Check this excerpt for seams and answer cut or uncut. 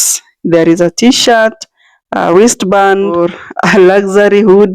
cut